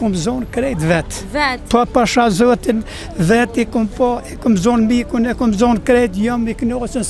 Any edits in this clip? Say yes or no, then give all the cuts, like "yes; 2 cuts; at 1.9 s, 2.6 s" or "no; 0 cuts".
no; 0 cuts